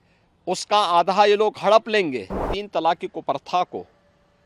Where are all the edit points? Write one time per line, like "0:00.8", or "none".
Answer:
0:02.5